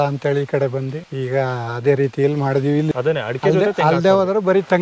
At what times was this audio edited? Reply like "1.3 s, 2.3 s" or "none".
1.0 s, 2.9 s